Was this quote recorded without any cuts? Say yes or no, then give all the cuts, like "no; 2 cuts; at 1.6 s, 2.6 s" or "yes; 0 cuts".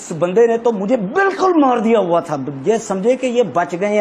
yes; 0 cuts